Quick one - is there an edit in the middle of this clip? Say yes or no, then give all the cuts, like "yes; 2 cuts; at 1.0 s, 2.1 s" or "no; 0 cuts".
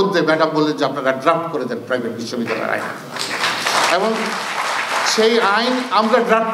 no; 0 cuts